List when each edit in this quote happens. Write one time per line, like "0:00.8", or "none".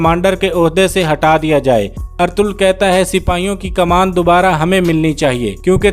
0:02.0